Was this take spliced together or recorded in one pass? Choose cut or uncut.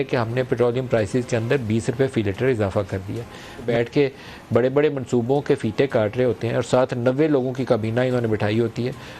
cut